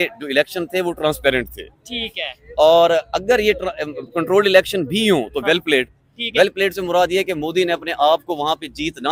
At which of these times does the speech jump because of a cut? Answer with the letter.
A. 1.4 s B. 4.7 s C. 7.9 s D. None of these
D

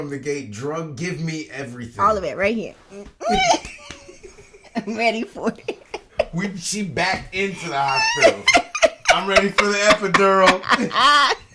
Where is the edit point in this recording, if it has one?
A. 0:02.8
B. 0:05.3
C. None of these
C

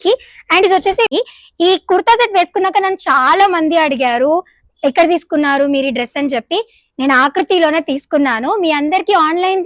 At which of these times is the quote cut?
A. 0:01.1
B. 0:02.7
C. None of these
A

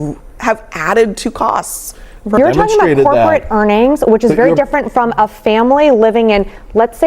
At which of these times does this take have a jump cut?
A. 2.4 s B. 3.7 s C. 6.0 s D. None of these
A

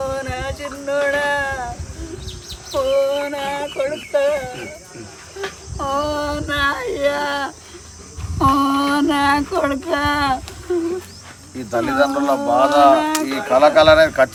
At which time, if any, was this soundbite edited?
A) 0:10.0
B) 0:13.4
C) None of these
C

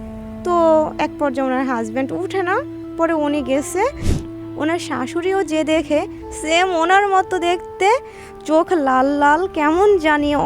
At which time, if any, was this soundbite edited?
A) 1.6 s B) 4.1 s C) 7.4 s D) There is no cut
B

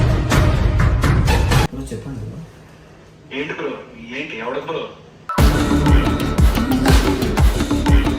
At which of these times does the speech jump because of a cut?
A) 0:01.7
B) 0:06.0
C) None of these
A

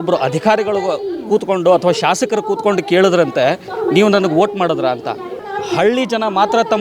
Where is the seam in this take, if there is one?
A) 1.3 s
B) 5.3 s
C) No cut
B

